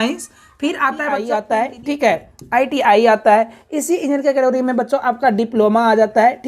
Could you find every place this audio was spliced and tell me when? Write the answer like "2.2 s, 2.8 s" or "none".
1.2 s